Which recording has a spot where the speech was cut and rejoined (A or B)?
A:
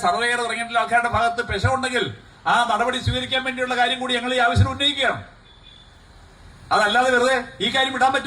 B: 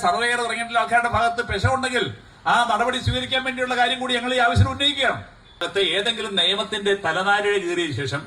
B